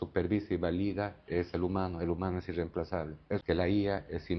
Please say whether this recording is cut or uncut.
cut